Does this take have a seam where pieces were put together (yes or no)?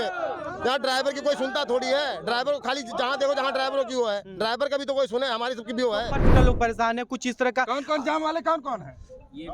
yes